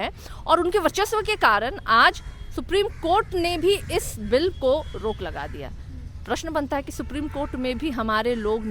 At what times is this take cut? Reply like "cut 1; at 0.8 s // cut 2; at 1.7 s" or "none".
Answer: none